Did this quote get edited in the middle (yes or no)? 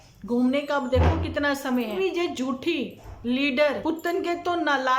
yes